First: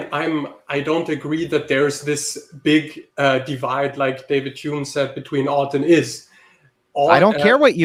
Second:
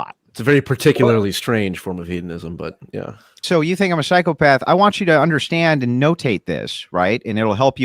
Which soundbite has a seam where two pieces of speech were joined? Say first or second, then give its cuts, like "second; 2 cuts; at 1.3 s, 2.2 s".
second; 1 cut; at 3.4 s